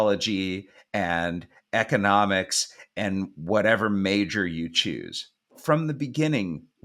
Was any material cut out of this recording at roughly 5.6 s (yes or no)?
yes